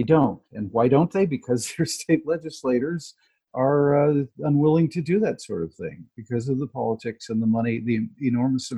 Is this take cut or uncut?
uncut